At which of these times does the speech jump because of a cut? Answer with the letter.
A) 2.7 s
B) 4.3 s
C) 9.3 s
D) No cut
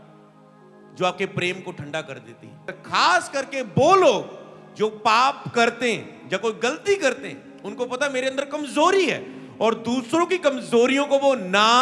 A